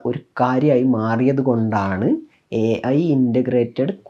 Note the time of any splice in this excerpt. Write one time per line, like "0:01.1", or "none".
none